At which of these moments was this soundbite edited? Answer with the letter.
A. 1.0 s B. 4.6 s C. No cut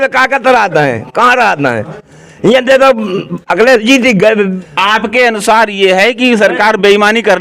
B